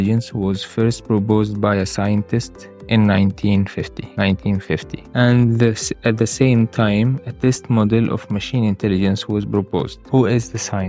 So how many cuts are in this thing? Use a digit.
3